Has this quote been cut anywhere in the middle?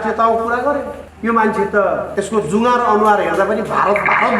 yes; 2 cuts; at 1.0 s, 2.1 s

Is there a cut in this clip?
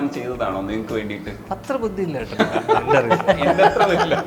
no; 0 cuts

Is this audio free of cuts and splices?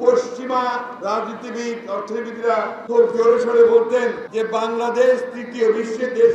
no; 3 cuts; at 0.9 s, 2.8 s, 4.2 s

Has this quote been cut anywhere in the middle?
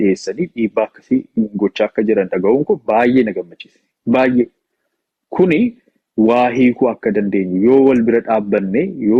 no; 0 cuts

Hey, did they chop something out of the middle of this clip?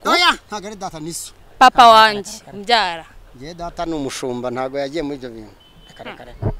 no; 0 cuts

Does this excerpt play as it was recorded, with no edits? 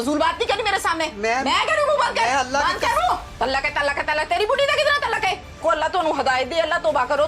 no; 1 cut; at 5.6 s

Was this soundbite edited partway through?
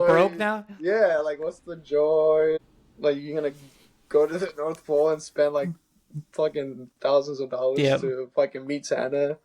yes; 1 cut; at 2.6 s

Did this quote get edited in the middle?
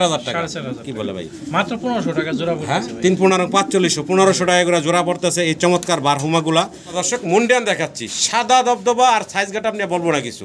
yes; 1 cut; at 6.8 s

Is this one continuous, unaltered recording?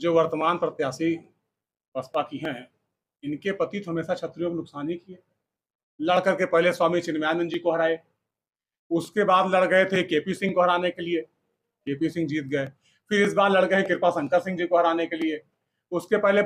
yes; 0 cuts

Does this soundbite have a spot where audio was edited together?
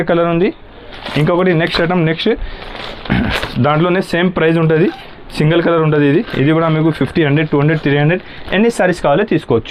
no; 0 cuts

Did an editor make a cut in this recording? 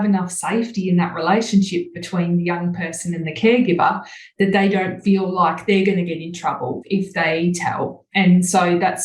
yes; 1 cut; at 8.0 s

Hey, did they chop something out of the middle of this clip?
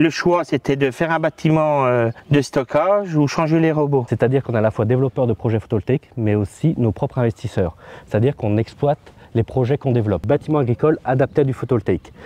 yes; 3 cuts; at 2.2 s, 4.1 s, 10.2 s

